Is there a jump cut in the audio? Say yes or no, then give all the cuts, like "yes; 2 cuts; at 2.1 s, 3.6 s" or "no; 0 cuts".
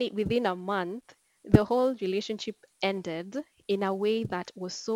no; 0 cuts